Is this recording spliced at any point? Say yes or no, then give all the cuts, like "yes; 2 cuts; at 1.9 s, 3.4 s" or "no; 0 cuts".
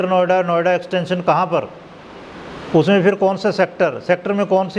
no; 0 cuts